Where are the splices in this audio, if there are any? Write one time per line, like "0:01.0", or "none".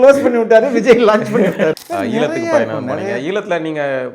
0:01.7